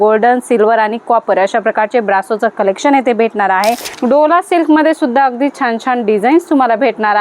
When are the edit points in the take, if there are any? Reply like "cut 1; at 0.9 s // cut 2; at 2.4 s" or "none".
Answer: cut 1; at 3.9 s